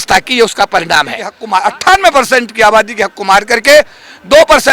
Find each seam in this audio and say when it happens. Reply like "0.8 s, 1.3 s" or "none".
1.3 s